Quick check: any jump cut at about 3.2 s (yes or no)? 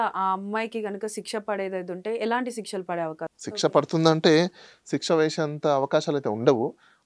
yes